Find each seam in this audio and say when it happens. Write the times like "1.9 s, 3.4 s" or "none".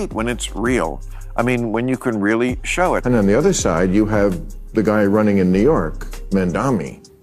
3.0 s